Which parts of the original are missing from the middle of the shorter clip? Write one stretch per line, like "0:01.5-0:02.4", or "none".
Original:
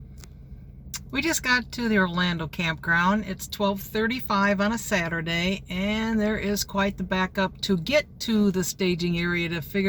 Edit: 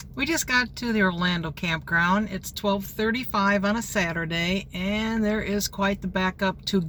none